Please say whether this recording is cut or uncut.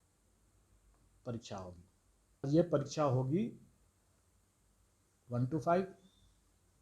cut